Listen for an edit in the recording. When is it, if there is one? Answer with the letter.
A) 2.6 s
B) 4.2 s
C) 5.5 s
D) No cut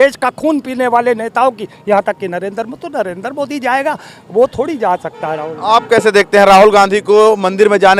D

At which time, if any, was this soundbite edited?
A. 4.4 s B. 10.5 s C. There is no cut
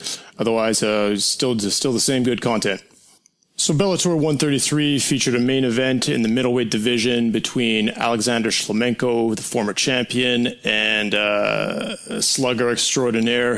A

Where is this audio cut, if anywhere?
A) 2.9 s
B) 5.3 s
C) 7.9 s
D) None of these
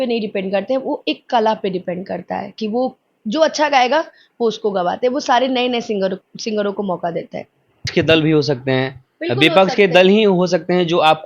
C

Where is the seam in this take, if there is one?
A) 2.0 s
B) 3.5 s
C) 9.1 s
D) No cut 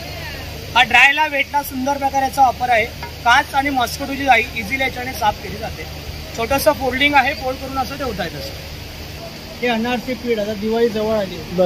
C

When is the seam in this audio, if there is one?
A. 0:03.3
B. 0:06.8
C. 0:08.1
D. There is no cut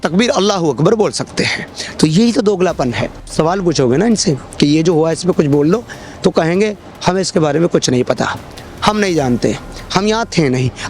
A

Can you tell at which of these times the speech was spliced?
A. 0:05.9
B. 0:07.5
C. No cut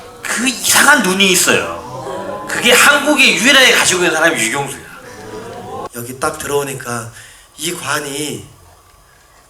A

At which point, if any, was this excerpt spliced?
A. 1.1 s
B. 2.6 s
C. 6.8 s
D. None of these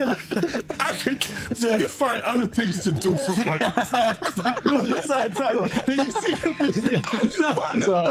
D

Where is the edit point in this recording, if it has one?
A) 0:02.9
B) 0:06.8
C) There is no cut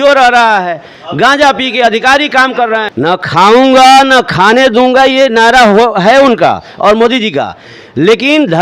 A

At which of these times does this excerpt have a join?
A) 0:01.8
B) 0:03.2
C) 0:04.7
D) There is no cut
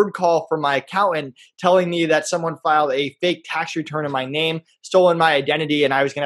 D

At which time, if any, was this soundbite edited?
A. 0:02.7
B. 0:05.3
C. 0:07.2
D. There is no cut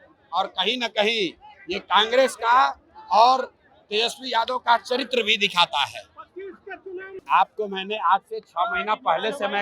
C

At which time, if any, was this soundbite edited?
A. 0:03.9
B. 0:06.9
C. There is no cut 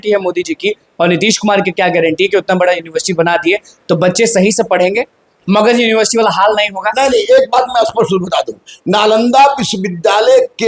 C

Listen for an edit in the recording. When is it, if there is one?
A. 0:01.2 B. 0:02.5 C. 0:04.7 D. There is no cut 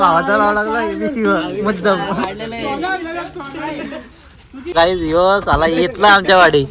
C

